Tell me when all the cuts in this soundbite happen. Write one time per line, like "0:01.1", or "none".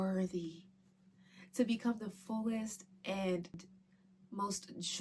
0:03.6